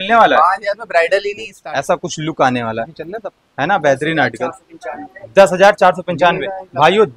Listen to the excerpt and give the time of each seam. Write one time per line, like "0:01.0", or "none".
0:01.5